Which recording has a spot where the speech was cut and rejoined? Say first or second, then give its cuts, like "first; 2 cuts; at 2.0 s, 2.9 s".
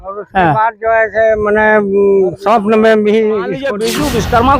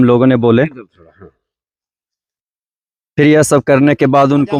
first; 1 cut; at 3.7 s